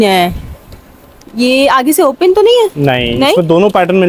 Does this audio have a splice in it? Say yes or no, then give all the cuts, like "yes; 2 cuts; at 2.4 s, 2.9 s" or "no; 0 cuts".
no; 0 cuts